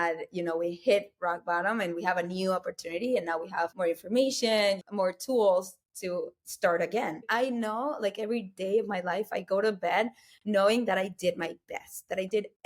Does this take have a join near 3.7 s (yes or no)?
yes